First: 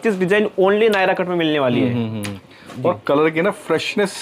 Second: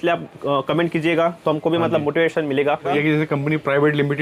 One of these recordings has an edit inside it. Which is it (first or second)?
second